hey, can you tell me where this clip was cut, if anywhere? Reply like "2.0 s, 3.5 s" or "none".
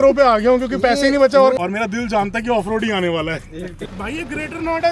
1.5 s, 3.5 s